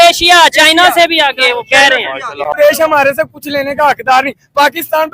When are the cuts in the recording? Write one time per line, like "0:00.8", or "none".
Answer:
0:02.6